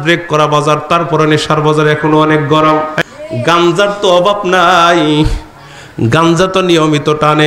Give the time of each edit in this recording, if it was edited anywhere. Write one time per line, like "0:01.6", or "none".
0:02.9